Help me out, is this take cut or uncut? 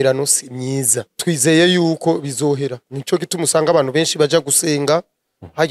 cut